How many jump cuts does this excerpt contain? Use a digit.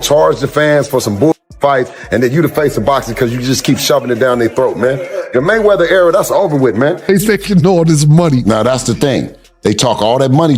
1